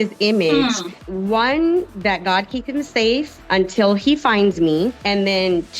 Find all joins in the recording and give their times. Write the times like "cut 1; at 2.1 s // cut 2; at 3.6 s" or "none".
cut 1; at 0.9 s // cut 2; at 1.9 s // cut 3; at 3.4 s // cut 4; at 5.0 s

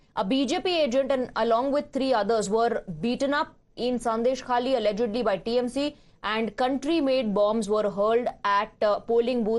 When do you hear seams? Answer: none

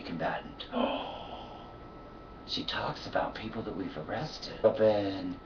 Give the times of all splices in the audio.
none

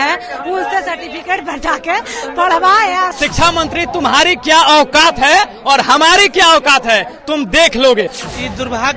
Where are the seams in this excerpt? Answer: cut 1; at 3.1 s // cut 2; at 8.1 s

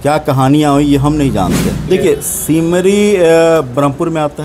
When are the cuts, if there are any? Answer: cut 1; at 1.8 s

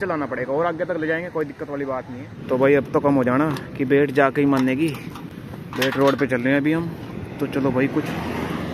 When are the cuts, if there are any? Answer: none

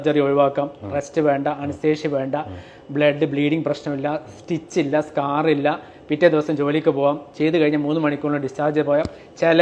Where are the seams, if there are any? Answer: none

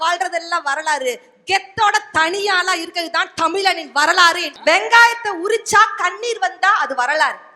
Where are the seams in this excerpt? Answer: cut 1; at 4.5 s

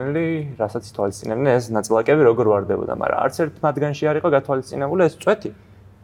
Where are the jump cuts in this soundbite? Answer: none

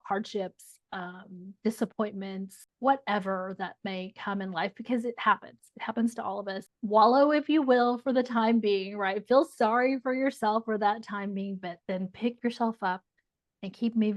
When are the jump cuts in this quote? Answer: cut 1; at 2.6 s // cut 2; at 6.7 s

